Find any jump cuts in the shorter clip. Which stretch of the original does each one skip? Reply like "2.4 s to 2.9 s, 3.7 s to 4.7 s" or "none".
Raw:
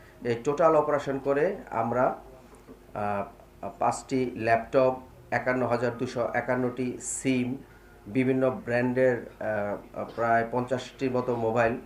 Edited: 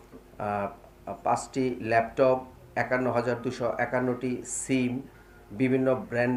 none